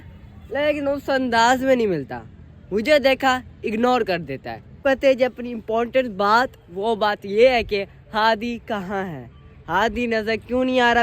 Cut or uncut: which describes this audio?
cut